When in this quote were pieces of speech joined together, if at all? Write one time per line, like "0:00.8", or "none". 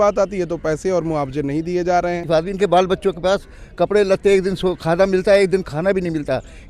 0:02.2